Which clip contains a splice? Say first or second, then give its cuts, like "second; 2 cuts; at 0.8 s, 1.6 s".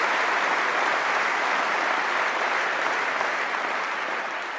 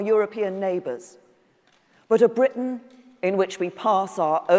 first; 1 cut; at 3.6 s